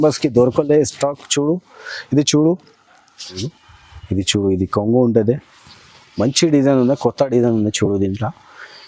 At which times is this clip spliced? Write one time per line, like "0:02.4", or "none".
0:03.5